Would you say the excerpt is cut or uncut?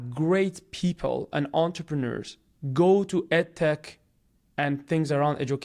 uncut